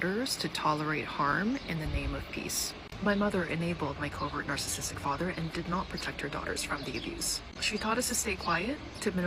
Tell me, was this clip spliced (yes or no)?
no